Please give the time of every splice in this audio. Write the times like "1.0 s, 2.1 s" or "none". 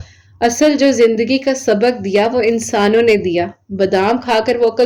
none